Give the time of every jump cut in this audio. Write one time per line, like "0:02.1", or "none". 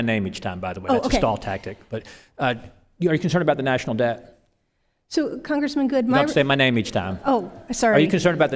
none